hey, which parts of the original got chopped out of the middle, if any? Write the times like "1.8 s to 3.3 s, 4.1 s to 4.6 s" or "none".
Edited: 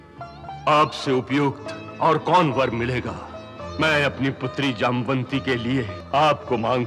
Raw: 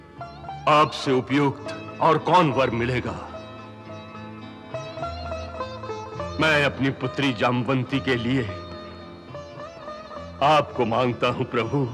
3.6 s to 6.2 s, 8.6 s to 10.3 s